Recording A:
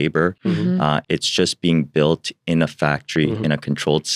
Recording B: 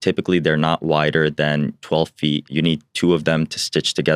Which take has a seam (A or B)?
B